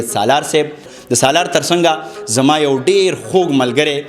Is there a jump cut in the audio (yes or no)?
yes